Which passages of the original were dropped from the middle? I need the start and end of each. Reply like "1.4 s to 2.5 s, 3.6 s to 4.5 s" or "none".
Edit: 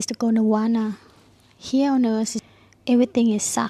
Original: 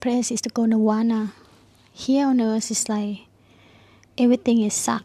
2.8 s to 3.7 s